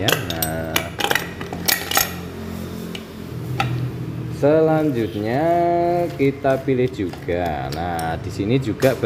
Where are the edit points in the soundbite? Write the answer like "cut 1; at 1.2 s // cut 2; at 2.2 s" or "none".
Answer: none